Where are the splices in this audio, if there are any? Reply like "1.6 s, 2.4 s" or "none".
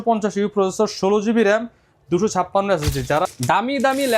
3.2 s